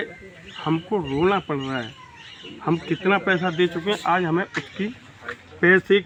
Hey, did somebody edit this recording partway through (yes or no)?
no